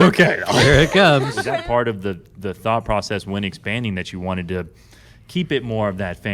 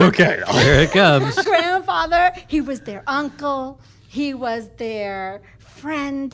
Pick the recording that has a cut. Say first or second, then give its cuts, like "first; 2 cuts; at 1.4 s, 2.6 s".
first; 1 cut; at 1.4 s